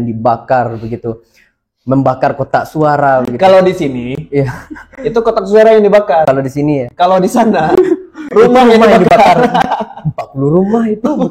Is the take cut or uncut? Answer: uncut